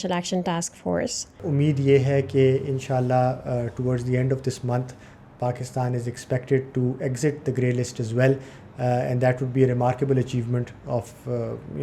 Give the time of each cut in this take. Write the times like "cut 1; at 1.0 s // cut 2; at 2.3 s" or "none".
cut 1; at 1.4 s